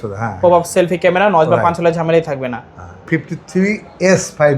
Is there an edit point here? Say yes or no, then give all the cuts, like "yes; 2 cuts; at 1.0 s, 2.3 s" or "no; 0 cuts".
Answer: yes; 1 cut; at 3.1 s